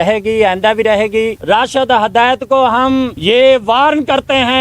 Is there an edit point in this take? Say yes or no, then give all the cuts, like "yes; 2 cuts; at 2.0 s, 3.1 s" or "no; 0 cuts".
yes; 2 cuts; at 1.4 s, 3.2 s